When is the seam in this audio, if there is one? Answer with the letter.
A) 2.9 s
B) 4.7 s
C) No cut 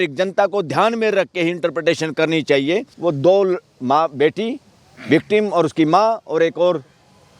A